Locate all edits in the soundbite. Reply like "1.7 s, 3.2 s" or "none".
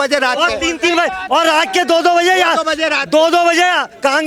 none